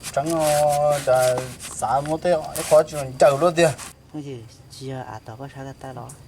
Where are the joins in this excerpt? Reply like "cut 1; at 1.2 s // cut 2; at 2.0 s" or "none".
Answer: cut 1; at 3.9 s